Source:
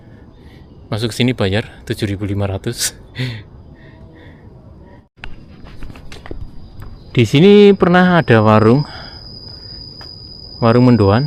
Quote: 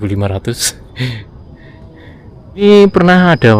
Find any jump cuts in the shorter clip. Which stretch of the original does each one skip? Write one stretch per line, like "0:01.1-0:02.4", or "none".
0:04.8-0:07.5